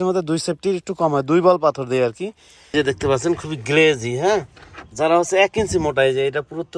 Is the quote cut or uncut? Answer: cut